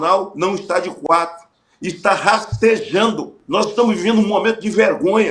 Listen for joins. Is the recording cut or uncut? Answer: cut